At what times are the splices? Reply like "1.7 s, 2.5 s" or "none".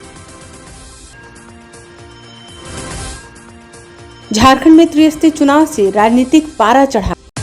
1.1 s